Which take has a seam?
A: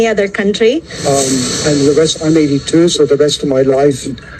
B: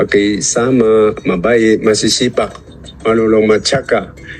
A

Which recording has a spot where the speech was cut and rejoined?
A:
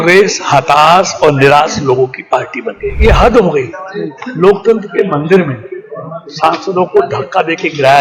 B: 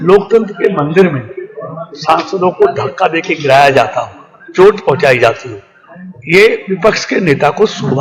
A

